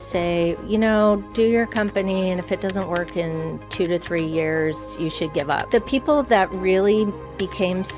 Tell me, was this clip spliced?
yes; 1 cut; at 5.7 s

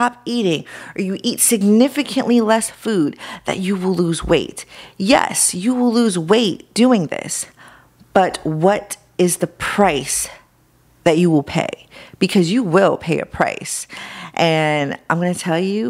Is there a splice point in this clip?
no; 0 cuts

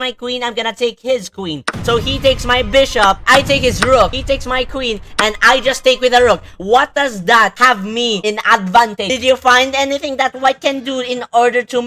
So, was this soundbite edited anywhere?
yes; 2 cuts; at 3.2 s, 9.0 s

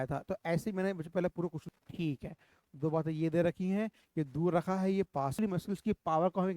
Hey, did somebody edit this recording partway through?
yes; 2 cuts; at 1.6 s, 5.4 s

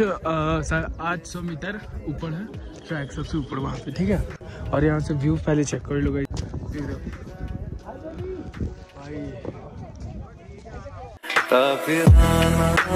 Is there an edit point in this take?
no; 0 cuts

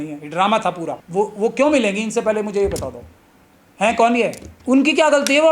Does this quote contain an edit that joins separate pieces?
yes; 2 cuts; at 0.9 s, 4.5 s

